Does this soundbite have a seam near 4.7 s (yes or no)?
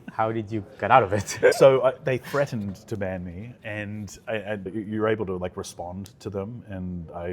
yes